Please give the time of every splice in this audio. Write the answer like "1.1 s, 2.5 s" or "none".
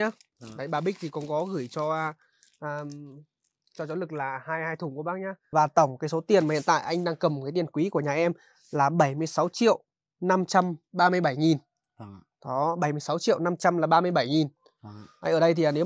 5.3 s